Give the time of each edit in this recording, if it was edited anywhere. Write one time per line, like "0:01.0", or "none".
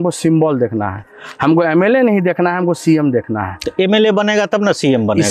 none